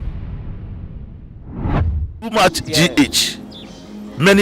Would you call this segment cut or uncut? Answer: cut